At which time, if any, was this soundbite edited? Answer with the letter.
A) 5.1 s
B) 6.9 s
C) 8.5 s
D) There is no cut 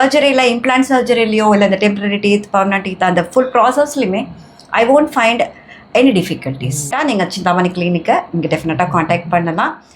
B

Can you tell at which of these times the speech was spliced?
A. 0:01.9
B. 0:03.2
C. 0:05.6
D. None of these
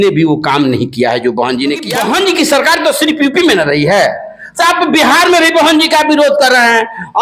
A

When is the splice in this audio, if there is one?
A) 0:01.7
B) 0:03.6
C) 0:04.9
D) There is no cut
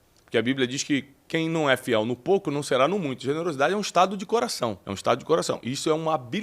C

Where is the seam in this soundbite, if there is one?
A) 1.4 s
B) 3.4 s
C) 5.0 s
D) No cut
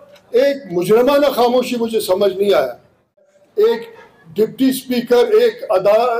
B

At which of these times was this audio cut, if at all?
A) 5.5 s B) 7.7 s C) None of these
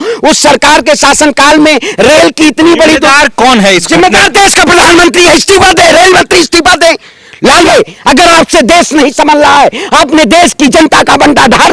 B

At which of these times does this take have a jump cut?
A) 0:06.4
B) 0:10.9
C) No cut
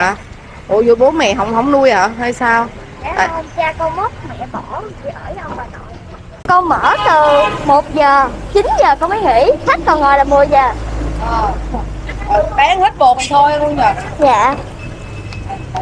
A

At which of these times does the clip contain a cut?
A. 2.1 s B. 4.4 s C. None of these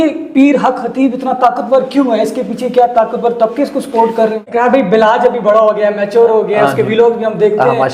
B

